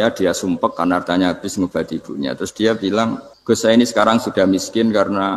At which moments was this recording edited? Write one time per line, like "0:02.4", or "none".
0:03.3

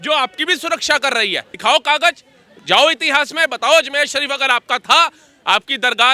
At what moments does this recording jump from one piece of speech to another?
0:01.5

